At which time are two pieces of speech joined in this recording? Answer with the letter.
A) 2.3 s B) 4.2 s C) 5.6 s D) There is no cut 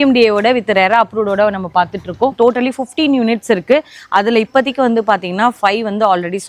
A